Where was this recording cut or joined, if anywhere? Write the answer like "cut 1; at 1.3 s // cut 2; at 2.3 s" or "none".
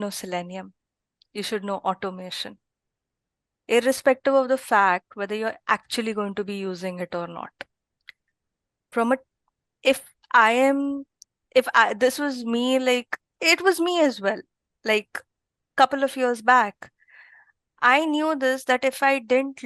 none